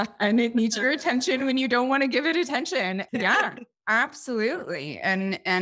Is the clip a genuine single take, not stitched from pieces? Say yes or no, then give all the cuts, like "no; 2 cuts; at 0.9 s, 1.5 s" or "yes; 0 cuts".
no; 1 cut; at 3.1 s